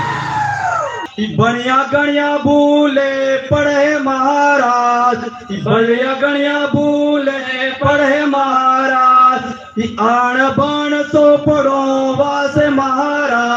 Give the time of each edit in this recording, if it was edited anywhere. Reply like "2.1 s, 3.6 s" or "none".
1.0 s